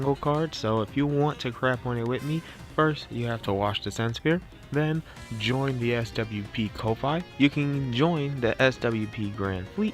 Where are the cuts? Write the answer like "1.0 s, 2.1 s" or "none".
none